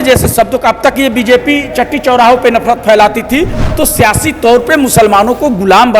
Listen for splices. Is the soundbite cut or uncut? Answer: cut